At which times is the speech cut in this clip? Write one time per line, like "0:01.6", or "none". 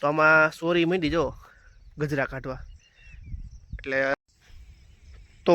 0:04.1

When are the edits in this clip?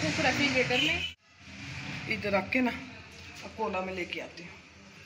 0:01.0

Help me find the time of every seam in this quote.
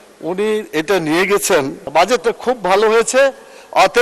0:01.8

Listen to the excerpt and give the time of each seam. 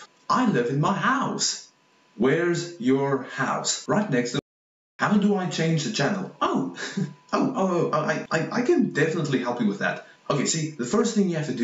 0:04.4

